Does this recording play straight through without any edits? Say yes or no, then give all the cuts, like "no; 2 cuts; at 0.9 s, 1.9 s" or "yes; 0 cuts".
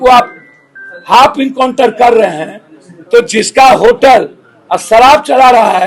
yes; 0 cuts